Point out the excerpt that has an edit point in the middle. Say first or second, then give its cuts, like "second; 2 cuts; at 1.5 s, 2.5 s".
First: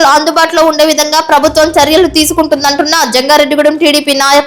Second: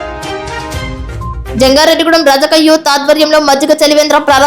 second; 1 cut; at 1.3 s